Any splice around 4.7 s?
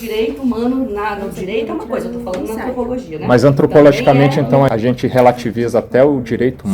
yes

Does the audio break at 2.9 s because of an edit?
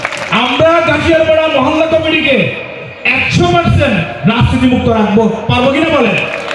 no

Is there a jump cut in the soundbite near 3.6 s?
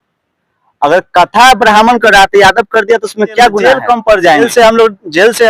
yes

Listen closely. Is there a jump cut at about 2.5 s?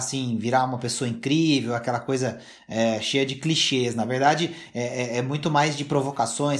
no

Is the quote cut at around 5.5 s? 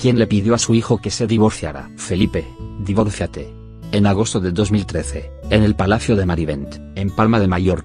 no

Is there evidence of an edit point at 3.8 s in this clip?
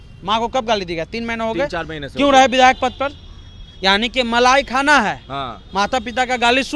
no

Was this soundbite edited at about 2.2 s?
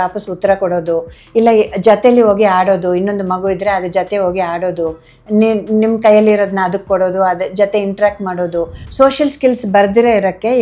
no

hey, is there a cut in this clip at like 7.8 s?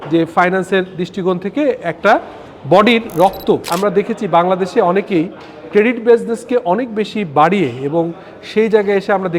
no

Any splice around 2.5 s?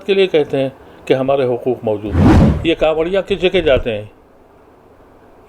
yes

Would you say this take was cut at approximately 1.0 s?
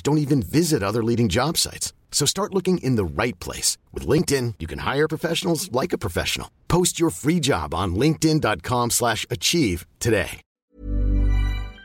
no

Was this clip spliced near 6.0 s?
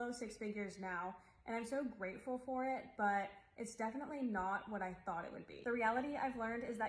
yes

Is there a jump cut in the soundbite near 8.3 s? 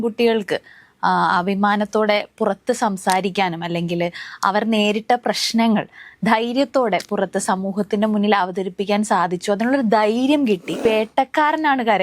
no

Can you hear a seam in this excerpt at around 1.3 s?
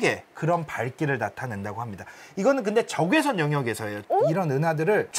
no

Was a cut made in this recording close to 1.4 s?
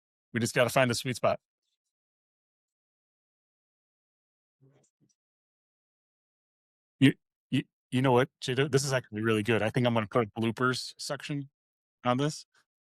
no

